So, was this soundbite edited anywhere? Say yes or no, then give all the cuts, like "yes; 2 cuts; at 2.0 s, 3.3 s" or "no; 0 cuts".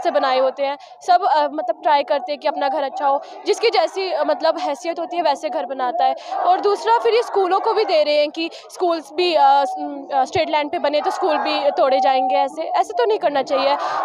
no; 0 cuts